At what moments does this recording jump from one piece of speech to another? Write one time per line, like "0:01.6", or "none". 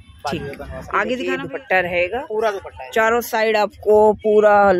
0:01.2